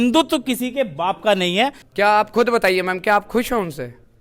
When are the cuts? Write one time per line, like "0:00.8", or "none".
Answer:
0:01.8